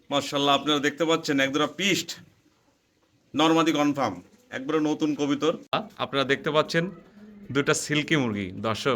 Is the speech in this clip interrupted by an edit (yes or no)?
yes